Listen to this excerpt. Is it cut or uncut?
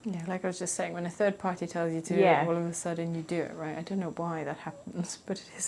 uncut